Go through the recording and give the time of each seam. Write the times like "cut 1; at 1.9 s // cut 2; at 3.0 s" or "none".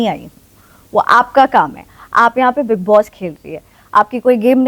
none